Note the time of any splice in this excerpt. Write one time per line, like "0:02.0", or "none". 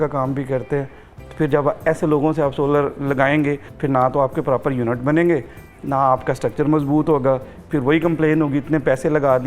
0:03.7